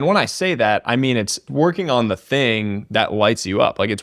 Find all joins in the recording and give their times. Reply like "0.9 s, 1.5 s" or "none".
1.5 s